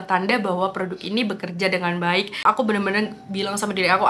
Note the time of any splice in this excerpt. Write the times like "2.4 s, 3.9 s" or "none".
2.4 s